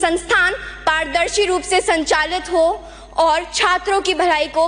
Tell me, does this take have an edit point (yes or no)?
no